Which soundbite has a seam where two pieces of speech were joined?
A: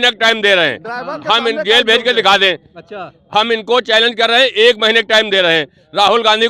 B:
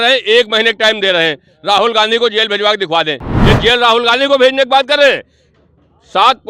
B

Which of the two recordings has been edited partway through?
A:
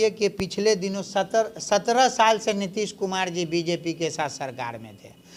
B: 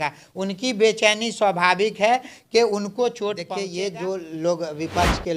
B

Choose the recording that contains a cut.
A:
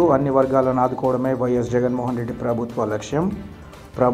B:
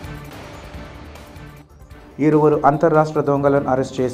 B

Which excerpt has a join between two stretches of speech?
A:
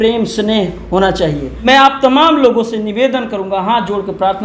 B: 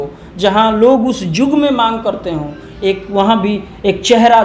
A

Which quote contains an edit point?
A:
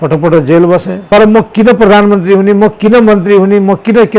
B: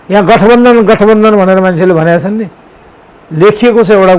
A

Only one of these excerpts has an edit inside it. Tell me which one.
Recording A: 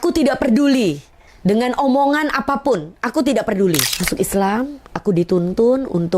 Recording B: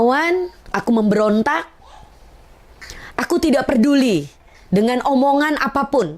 A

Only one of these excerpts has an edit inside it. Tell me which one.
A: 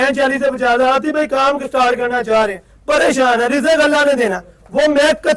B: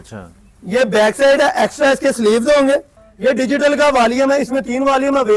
B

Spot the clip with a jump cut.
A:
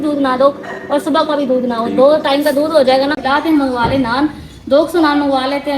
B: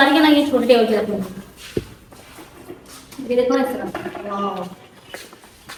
A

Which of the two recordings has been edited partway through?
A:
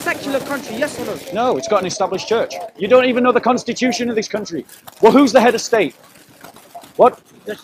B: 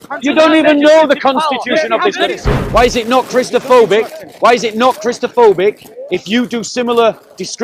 B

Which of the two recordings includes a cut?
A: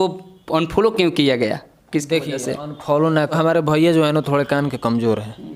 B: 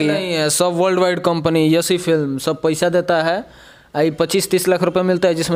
A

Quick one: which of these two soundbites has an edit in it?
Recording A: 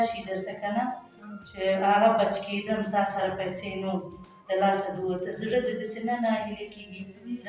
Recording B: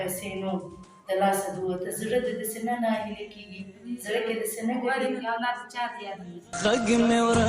B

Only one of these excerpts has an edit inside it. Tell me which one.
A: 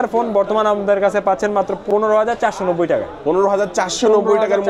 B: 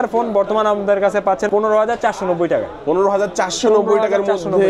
B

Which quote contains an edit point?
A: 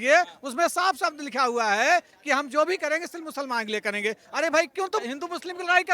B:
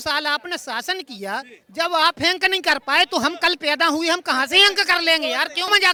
A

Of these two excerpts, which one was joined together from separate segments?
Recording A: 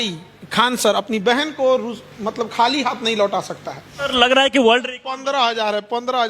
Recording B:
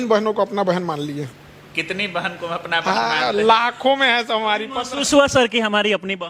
A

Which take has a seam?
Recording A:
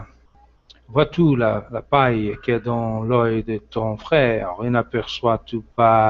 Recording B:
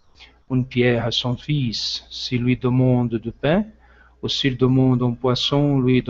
A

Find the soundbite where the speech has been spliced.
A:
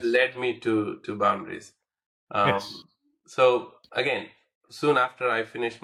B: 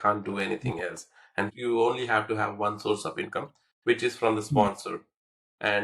B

